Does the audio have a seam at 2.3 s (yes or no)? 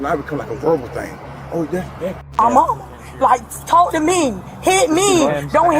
yes